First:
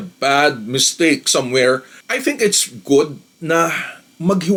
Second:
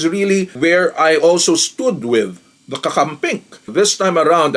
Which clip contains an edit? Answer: second; 2 cuts; at 2.5 s, 3.6 s

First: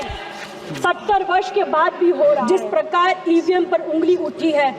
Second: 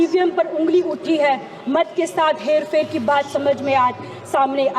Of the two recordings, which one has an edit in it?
first; 1 cut; at 2.4 s

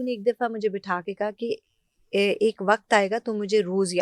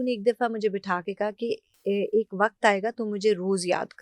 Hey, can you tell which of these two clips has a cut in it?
second; 1 cut; at 1.7 s

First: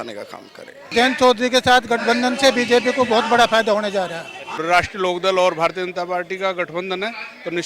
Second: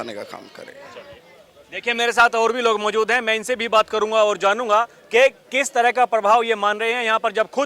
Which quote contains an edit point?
first; 2 cuts; at 0.9 s, 4.6 s

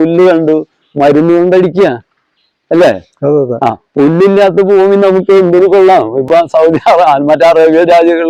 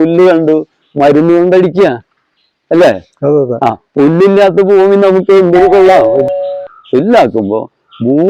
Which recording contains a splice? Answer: second; 1 cut; at 6.2 s

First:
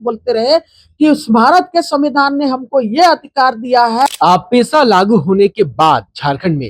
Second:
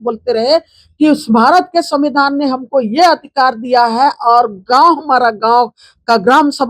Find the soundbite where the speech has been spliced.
first; 1 cut; at 4.1 s

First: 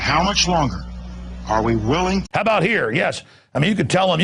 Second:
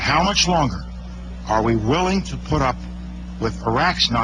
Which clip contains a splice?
second; 1 cut; at 2.3 s

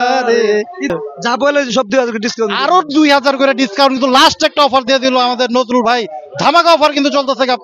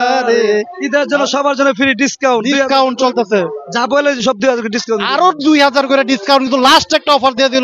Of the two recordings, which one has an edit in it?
first; 1 cut; at 0.9 s

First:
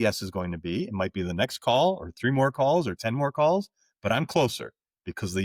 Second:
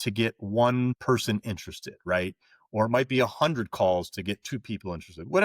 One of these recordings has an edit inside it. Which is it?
second; 1 cut; at 1.0 s

